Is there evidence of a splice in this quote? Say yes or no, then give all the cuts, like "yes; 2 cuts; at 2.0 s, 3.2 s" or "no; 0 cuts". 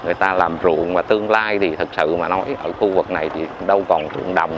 no; 0 cuts